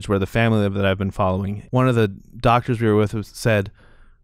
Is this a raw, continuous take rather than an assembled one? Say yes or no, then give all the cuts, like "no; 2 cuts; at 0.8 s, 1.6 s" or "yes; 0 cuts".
no; 1 cut; at 1.6 s